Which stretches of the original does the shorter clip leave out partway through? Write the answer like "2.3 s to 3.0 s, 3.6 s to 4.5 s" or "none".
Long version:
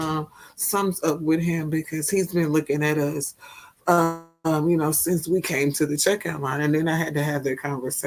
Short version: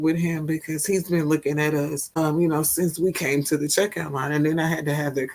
3.3 s to 4.3 s